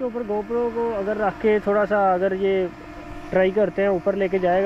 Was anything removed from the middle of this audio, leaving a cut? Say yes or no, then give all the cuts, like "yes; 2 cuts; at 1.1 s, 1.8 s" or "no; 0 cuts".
no; 0 cuts